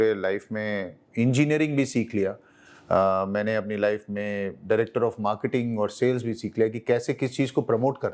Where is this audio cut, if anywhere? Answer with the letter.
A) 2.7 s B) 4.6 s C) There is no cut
C